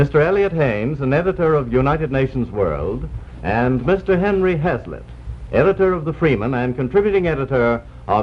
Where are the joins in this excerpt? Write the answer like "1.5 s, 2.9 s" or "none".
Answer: none

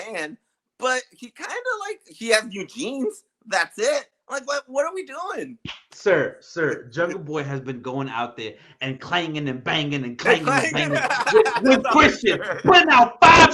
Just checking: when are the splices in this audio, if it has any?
2.1 s

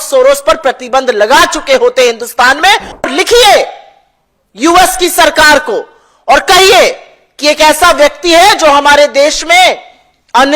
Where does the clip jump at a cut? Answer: 3.1 s

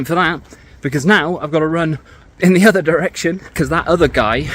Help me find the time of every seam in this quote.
3.5 s

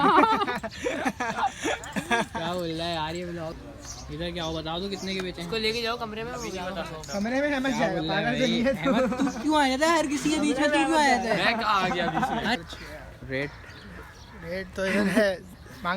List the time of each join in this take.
3.5 s, 12.6 s

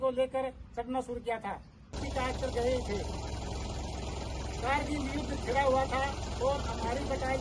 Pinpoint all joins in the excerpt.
1.9 s

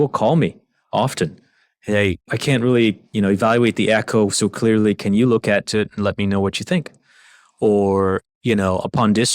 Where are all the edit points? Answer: 2.2 s

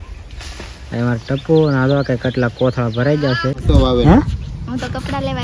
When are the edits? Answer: 3.6 s

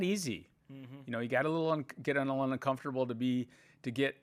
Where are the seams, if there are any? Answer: none

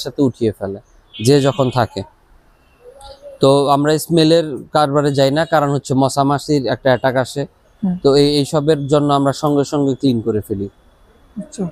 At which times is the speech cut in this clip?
none

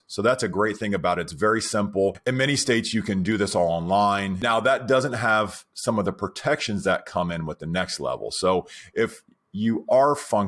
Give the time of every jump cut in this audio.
4.4 s

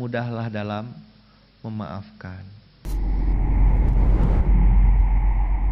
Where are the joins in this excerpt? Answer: 2.7 s

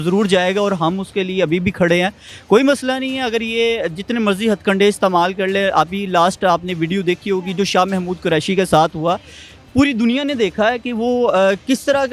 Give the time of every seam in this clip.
none

